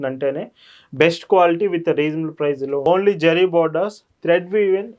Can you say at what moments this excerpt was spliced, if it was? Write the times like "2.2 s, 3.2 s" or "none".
2.9 s